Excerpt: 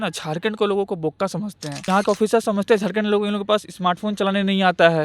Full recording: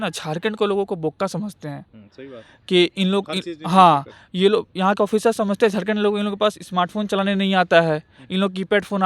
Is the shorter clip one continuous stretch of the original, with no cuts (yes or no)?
no